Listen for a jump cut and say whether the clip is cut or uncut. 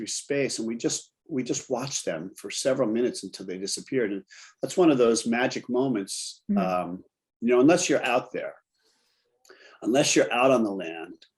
uncut